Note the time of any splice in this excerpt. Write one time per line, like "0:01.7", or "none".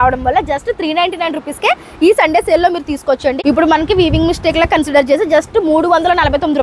0:03.4